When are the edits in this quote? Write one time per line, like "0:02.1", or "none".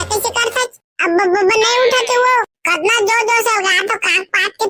none